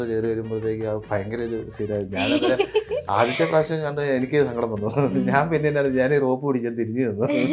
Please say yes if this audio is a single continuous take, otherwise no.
yes